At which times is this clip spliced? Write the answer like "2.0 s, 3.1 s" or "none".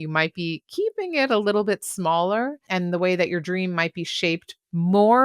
2.6 s

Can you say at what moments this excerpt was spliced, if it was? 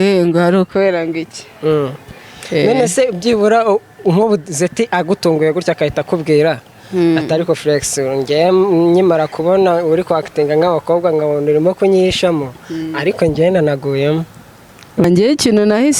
15.0 s

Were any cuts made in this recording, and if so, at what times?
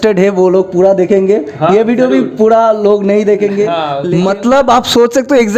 4.0 s

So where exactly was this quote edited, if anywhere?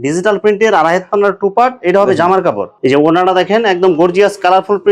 none

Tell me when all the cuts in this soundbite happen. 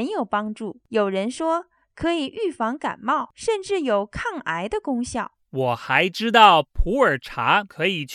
5.4 s

